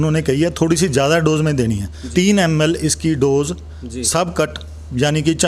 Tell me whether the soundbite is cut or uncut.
cut